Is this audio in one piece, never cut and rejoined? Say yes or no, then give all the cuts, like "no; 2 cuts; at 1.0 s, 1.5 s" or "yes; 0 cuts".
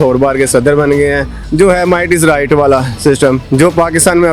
no; 2 cuts; at 1.4 s, 3.4 s